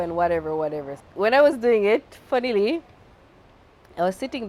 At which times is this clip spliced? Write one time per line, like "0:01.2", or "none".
0:00.9